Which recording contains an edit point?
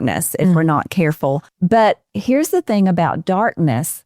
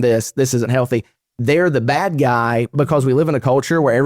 first; 1 cut; at 1.5 s

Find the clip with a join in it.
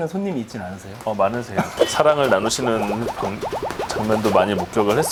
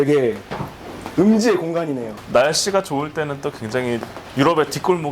second; 1 cut; at 2.2 s

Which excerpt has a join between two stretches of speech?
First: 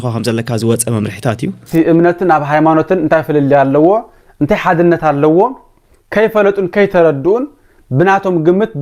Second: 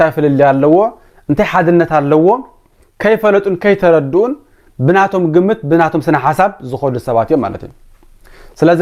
first; 1 cut; at 1.7 s

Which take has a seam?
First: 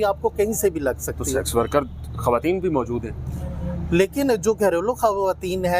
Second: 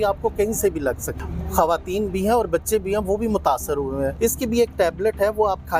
second; 2 cuts; at 1.1 s, 4.1 s

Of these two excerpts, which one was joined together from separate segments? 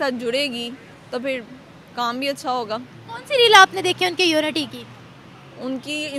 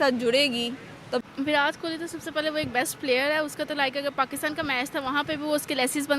second; 1 cut; at 1.2 s

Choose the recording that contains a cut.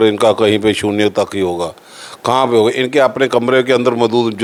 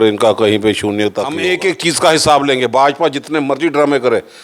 second; 1 cut; at 1.3 s

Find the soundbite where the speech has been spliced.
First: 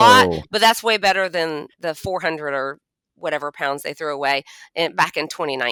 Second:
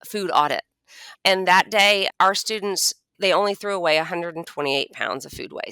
second; 3 cuts; at 1.0 s, 2.1 s, 3.2 s

